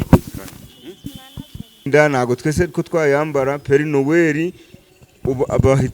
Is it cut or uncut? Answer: cut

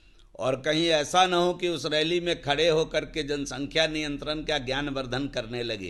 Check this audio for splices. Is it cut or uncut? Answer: uncut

